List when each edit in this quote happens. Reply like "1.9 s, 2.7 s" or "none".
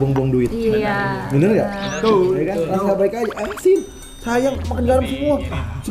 none